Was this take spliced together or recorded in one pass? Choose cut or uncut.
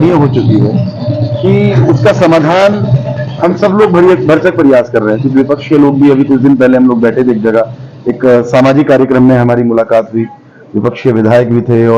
uncut